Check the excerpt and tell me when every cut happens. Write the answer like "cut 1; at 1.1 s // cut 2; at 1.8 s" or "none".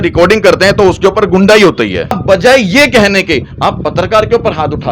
cut 1; at 2.2 s